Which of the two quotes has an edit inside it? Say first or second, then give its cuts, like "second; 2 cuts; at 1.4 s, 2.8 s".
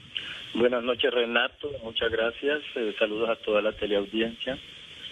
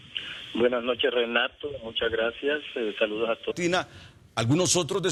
first; 1 cut; at 3.5 s